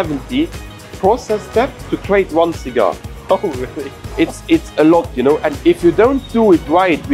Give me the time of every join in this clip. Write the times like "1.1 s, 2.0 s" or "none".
1.8 s, 5.5 s